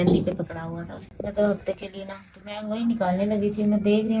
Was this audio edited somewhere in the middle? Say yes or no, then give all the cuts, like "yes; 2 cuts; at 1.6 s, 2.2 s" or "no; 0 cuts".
yes; 1 cut; at 1.0 s